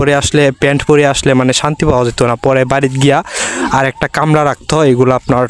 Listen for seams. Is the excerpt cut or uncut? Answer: uncut